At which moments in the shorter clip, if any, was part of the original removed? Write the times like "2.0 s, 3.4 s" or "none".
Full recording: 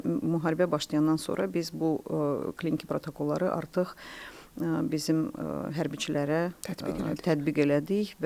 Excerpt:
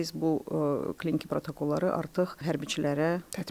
2.4 s